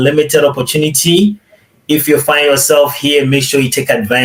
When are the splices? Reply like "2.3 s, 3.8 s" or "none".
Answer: none